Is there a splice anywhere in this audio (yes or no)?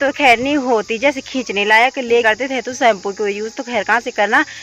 yes